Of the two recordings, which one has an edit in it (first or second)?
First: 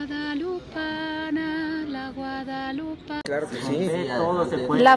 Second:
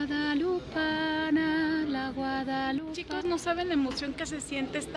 first